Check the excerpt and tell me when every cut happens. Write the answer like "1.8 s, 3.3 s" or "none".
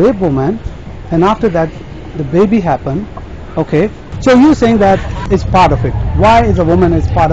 4.1 s, 5.2 s